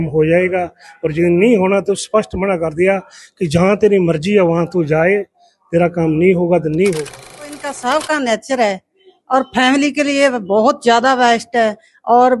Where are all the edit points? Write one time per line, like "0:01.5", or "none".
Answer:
0:07.7